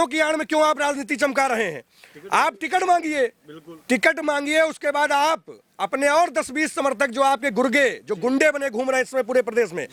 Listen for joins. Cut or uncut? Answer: uncut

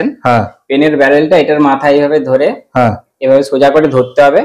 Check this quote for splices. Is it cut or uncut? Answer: uncut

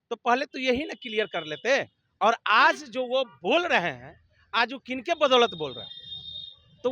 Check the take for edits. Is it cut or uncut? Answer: cut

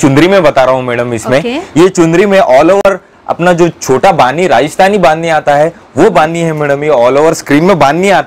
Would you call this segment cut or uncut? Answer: uncut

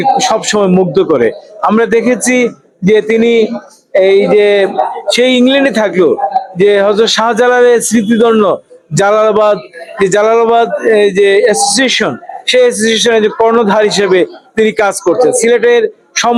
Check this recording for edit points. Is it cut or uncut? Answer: uncut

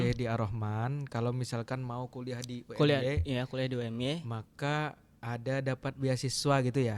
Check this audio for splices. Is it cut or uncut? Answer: uncut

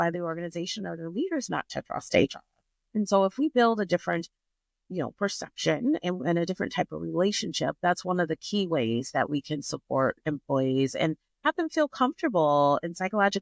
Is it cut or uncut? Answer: uncut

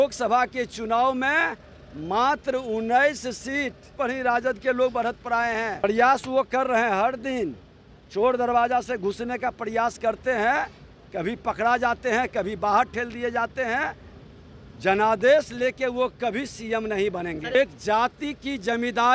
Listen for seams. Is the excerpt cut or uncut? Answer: cut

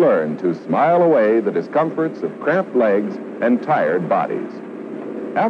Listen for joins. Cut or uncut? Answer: uncut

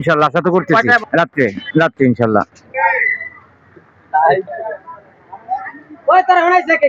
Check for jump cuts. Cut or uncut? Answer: uncut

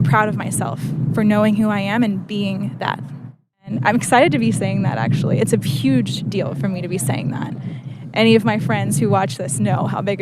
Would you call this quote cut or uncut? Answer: cut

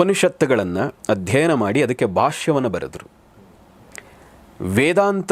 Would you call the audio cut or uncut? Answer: uncut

